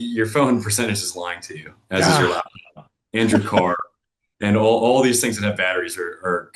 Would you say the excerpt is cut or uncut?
uncut